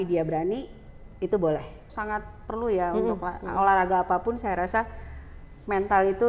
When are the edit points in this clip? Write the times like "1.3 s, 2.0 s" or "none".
1.9 s